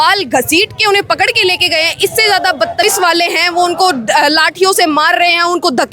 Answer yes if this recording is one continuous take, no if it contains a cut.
no